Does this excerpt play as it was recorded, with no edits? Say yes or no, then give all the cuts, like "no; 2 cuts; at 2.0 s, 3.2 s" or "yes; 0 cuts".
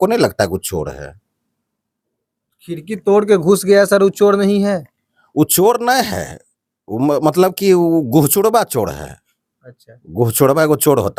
yes; 0 cuts